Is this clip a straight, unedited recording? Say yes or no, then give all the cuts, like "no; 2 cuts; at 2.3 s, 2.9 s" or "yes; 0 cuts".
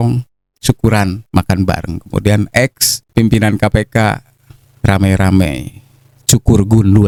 yes; 0 cuts